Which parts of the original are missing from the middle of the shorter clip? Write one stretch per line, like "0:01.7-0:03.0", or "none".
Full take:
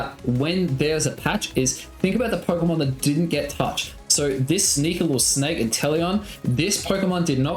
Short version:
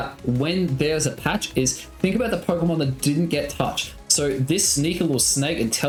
none